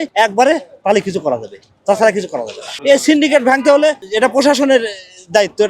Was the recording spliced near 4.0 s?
yes; 1 cut; at 4.0 s

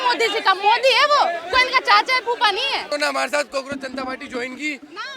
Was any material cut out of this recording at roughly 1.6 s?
no; 1 cut; at 2.9 s

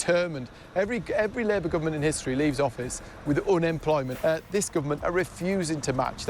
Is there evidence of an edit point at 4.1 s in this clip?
yes; 1 cut; at 4.1 s

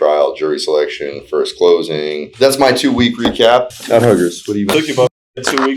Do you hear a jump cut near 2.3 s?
yes; 1 cut; at 2.3 s

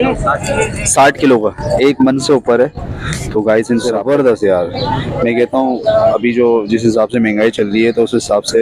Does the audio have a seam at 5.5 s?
no; 1 cut; at 4.0 s

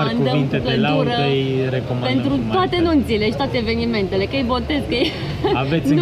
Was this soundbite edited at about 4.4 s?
no; 0 cuts

